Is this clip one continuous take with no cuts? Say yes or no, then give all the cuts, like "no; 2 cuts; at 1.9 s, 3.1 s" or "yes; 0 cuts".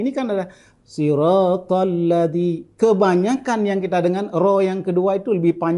yes; 0 cuts